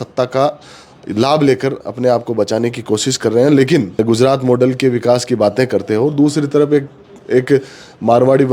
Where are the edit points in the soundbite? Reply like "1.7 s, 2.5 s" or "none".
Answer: 4.0 s